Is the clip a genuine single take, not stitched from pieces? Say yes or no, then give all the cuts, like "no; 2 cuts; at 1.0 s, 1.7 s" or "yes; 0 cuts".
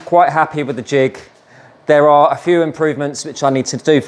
yes; 0 cuts